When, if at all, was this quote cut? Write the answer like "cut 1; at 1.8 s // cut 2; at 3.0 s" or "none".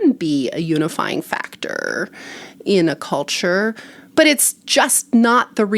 cut 1; at 4.0 s